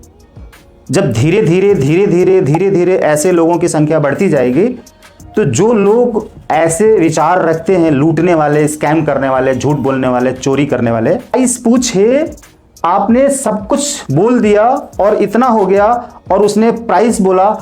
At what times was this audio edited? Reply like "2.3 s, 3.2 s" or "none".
11.3 s